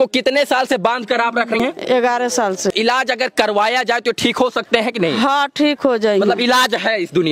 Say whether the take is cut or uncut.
cut